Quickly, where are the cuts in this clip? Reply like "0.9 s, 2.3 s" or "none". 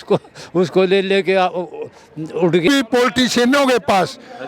2.7 s